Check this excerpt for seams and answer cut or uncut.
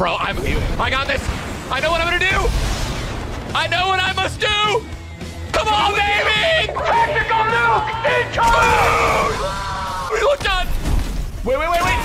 uncut